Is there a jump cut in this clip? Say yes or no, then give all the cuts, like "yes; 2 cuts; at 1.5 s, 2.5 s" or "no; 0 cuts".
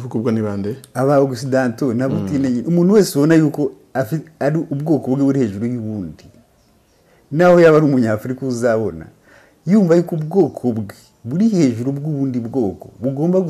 no; 0 cuts